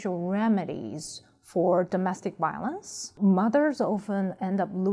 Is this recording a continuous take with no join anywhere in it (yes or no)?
yes